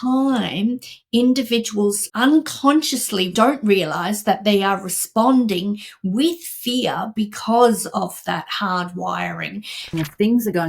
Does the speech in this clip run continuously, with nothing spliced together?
no; 3 cuts; at 2.1 s, 3.3 s, 9.9 s

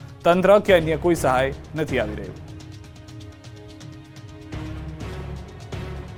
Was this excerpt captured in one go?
yes; 0 cuts

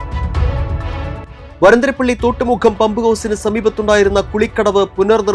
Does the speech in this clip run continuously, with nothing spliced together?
yes; 0 cuts

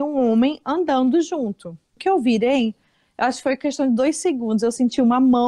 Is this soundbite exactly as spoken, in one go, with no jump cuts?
no; 1 cut; at 2.0 s

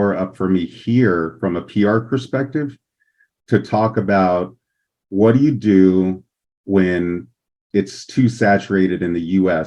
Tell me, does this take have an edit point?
no; 0 cuts

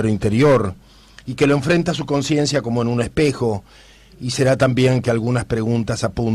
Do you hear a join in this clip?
yes; 1 cut; at 1.2 s

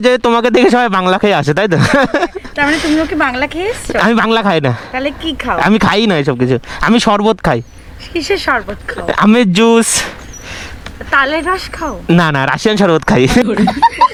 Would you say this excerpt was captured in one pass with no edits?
yes; 0 cuts

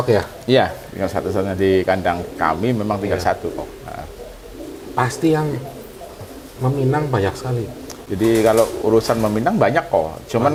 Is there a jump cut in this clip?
no; 0 cuts

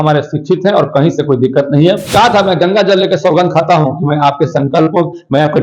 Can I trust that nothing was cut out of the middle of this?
no; 1 cut; at 2.1 s

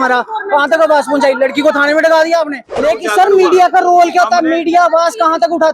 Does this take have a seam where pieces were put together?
yes; 1 cut; at 2.7 s

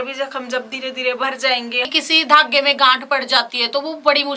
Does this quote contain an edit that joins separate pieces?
yes; 1 cut; at 1.9 s

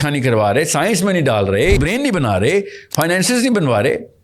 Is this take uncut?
no; 1 cut; at 1.8 s

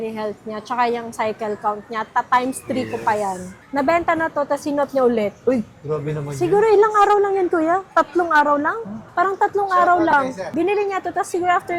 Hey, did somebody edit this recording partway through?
yes; 1 cut; at 3.4 s

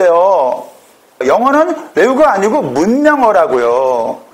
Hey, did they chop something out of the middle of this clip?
yes; 1 cut; at 1.2 s

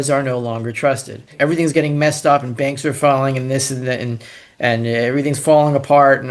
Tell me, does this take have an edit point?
yes; 1 cut; at 1.3 s

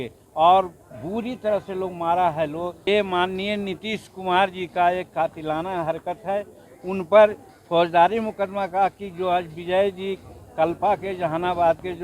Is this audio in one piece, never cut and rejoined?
no; 1 cut; at 2.9 s

